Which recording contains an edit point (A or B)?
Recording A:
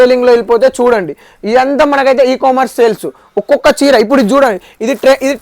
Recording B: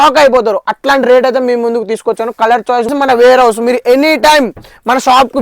B